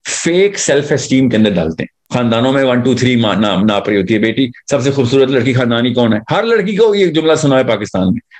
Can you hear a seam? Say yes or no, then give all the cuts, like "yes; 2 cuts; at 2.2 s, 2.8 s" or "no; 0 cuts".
yes; 1 cut; at 2.0 s